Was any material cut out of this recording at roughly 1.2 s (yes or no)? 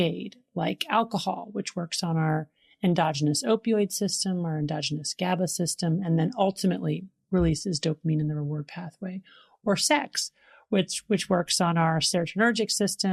no